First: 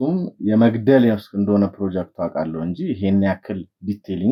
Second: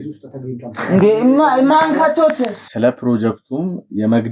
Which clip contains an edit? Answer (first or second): second